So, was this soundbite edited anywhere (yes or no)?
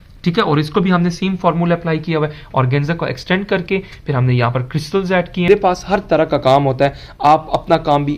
yes